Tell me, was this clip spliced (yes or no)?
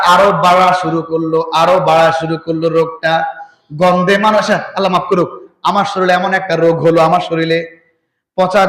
no